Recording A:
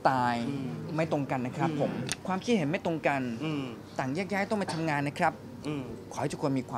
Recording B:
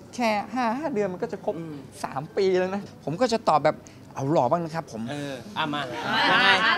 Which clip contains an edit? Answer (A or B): B